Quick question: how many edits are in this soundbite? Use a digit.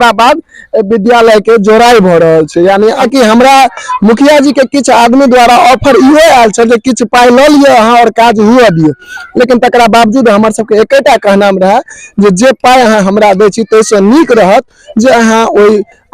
1